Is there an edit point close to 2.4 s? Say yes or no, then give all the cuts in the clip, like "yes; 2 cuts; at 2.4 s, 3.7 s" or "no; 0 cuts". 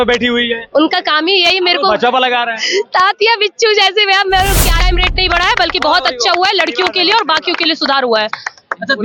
no; 1 cut; at 4.8 s